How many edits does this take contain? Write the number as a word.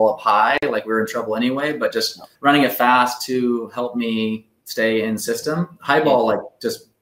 one